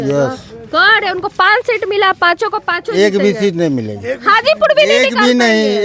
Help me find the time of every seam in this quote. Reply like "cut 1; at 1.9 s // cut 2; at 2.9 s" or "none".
none